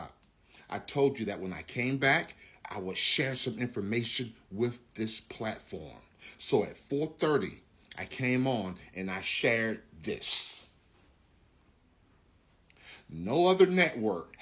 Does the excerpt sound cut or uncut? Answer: cut